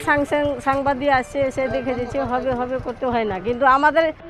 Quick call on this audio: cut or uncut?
uncut